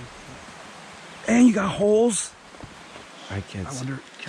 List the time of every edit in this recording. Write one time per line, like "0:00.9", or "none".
0:03.1